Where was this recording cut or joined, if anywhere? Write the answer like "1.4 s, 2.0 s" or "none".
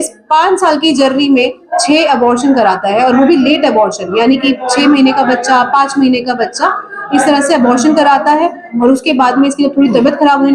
none